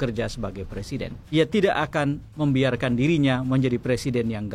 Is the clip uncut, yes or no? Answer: no